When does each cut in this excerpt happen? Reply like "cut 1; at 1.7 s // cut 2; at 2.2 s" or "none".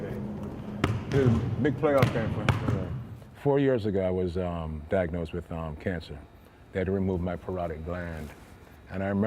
cut 1; at 6.2 s